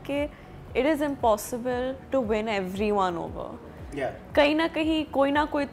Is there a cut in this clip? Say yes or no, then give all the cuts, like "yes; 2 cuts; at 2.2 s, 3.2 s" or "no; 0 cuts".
no; 0 cuts